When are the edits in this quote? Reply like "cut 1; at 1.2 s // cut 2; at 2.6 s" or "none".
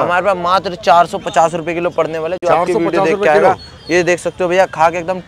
none